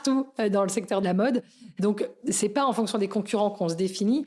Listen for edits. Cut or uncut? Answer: cut